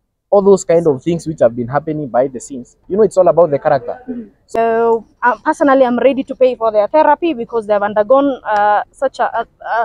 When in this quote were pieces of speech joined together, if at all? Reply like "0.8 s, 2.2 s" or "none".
4.6 s